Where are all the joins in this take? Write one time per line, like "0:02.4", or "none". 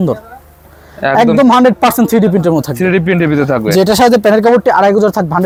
none

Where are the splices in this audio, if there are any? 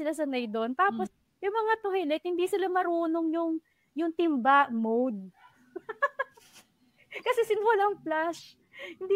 0:01.1

